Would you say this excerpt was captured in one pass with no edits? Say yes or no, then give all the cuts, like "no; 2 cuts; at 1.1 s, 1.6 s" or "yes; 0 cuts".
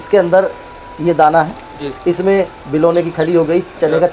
yes; 0 cuts